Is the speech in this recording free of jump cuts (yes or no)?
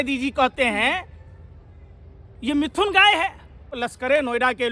no